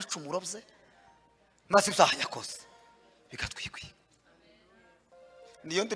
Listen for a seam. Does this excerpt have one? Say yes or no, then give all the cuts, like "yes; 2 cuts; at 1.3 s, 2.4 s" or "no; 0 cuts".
no; 0 cuts